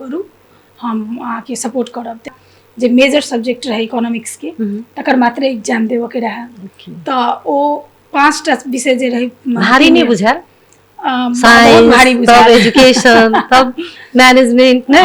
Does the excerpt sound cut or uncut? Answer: cut